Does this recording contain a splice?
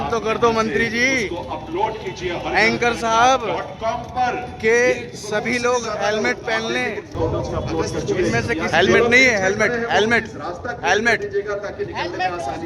yes; 1 cut; at 8.7 s

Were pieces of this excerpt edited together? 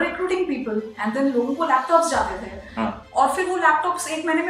no; 0 cuts

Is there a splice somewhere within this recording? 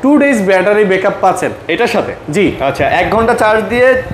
no; 0 cuts

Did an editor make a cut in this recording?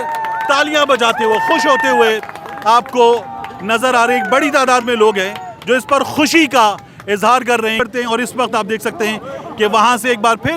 yes; 1 cut; at 7.8 s

